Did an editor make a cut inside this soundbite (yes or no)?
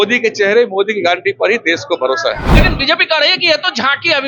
yes